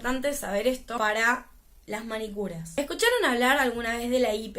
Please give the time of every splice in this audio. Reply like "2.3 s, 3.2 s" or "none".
1.0 s, 2.6 s

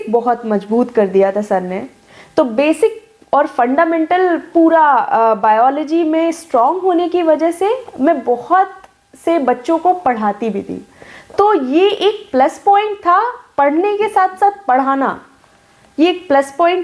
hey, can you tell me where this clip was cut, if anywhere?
none

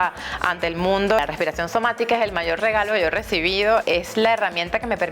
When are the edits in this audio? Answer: 1.2 s, 3.8 s

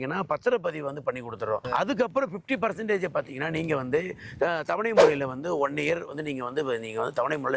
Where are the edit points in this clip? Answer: 1.6 s

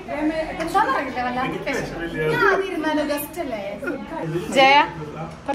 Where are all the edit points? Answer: 4.2 s

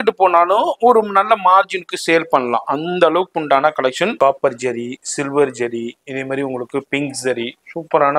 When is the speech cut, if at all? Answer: 4.1 s

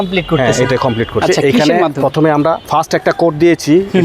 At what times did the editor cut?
2.6 s

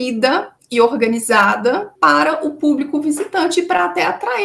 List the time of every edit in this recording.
none

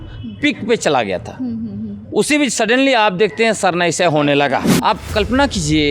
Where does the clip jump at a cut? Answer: 4.7 s

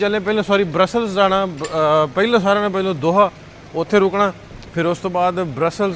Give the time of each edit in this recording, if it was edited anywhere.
none

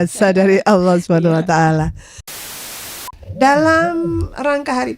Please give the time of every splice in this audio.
2.6 s

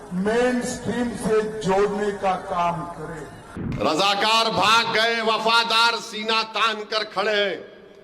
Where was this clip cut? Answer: 3.6 s

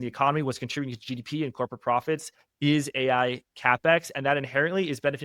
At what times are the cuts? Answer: none

